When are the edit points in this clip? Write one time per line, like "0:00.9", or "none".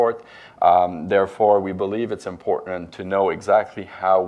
0:01.6